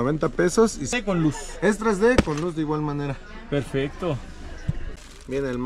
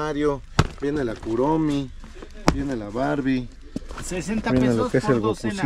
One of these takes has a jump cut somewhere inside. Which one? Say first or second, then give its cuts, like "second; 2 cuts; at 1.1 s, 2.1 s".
first; 2 cuts; at 0.9 s, 4.8 s